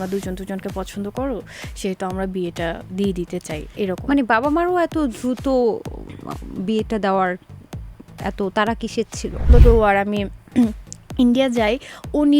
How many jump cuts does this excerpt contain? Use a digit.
1